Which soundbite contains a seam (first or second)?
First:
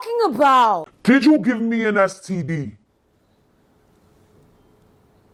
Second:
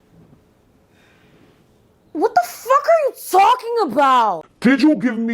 second